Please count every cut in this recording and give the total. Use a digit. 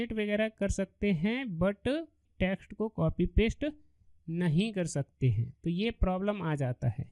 1